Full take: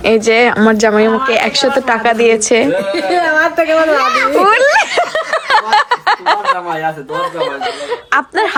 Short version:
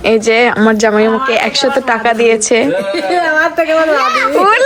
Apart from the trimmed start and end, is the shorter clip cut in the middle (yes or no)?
no